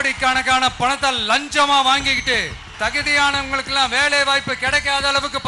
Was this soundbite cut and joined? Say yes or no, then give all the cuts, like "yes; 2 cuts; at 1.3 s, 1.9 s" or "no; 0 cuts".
yes; 1 cut; at 2.6 s